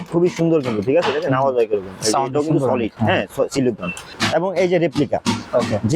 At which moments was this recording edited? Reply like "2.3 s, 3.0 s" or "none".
4.0 s